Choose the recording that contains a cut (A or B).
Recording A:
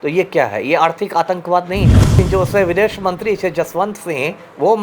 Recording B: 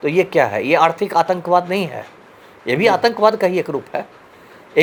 A